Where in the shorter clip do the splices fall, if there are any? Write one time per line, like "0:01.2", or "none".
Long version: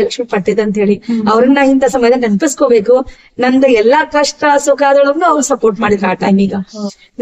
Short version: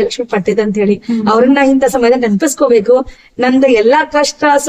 none